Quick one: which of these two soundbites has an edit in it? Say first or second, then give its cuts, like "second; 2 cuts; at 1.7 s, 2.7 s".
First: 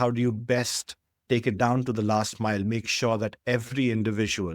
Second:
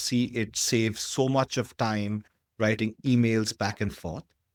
first; 1 cut; at 1.2 s